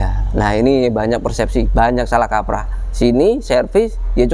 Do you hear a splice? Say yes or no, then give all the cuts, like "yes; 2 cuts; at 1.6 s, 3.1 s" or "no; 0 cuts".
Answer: no; 0 cuts